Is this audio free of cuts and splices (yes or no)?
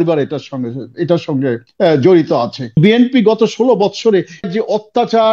no